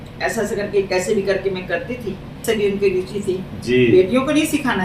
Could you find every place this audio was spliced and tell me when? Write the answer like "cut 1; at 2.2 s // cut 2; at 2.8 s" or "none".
cut 1; at 2.4 s